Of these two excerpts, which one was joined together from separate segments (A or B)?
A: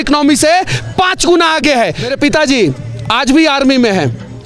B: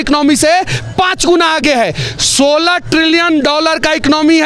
A